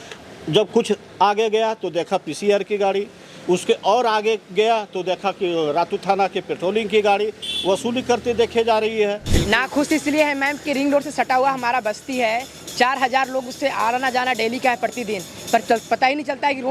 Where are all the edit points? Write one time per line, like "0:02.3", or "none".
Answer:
0:09.3